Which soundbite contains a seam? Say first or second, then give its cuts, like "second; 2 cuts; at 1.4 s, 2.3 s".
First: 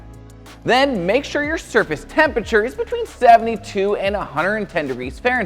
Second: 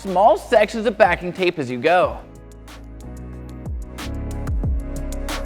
second; 1 cut; at 2.3 s